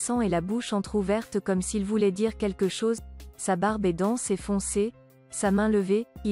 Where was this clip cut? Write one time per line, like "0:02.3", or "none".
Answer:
none